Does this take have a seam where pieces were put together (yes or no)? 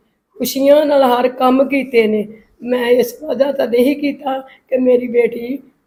no